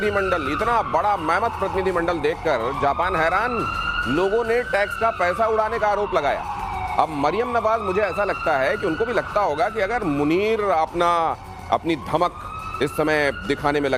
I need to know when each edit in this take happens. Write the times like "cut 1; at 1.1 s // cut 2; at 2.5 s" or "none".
none